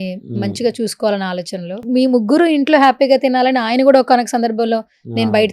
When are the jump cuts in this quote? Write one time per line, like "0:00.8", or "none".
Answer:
0:01.8